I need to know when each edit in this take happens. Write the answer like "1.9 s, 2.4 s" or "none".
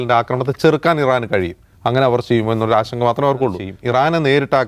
3.7 s